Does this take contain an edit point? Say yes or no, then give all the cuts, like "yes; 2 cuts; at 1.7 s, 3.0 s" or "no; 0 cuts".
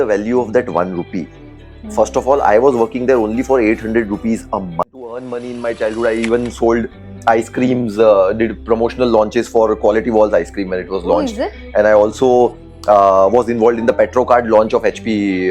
yes; 1 cut; at 5.3 s